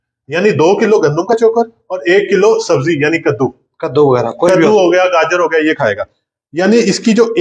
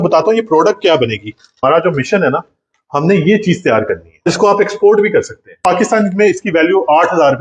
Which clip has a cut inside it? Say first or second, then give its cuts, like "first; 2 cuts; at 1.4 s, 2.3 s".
second; 3 cuts; at 1.6 s, 4.3 s, 5.6 s